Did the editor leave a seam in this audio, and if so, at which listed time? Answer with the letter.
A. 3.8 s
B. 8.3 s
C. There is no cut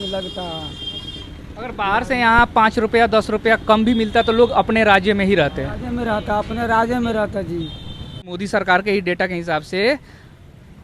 B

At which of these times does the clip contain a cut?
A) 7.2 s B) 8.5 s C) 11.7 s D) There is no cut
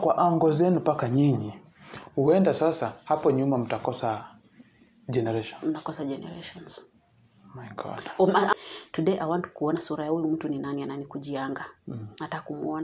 B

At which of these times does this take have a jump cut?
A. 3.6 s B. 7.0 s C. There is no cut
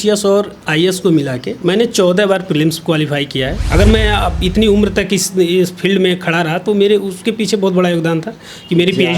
A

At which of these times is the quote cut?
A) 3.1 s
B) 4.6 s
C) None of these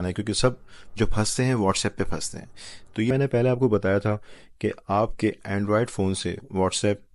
A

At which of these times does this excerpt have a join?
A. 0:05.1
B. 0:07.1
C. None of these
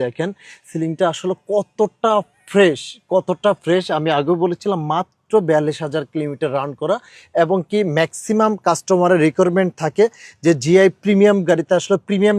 C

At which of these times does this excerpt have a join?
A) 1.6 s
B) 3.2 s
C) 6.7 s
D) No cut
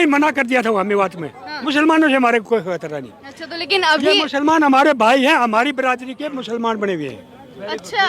A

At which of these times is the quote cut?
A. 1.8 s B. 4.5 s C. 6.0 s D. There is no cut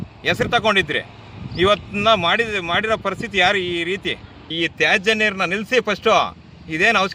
B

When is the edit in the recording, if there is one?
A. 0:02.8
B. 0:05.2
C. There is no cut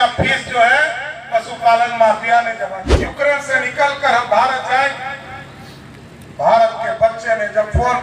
A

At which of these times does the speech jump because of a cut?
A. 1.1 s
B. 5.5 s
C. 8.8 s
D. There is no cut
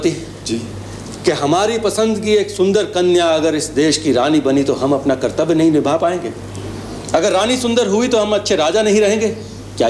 D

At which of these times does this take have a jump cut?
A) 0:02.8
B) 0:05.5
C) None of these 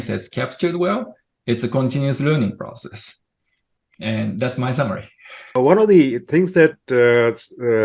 B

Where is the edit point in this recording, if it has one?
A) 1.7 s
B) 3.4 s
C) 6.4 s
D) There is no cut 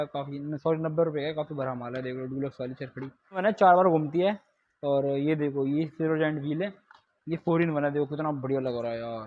B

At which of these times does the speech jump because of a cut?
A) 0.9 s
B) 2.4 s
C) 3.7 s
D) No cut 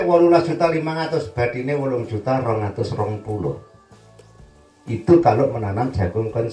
D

